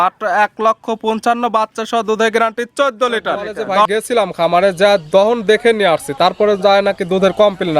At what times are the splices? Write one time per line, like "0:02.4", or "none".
0:03.9